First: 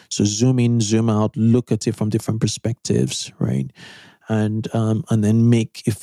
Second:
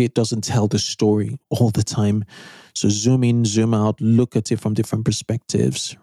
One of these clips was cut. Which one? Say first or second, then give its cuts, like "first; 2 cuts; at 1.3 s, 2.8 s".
second; 1 cut; at 1.4 s